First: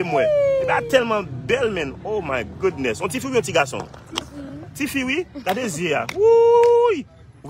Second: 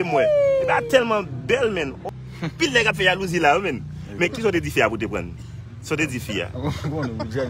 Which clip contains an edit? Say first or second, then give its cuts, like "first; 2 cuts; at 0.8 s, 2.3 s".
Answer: second; 1 cut; at 2.0 s